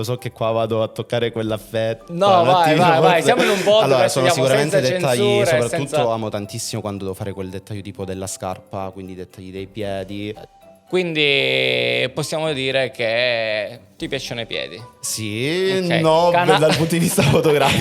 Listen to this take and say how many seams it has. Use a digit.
1